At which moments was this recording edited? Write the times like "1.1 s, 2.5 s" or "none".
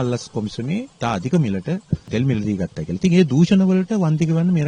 0.9 s, 2.0 s